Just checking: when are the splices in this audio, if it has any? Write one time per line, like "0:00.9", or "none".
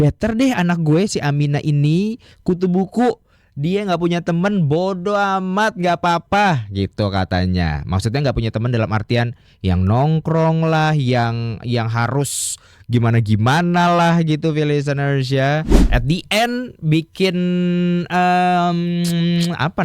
0:15.8